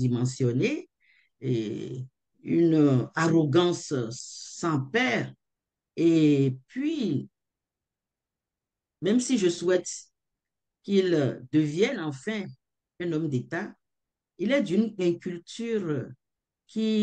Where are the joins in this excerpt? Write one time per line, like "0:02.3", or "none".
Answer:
none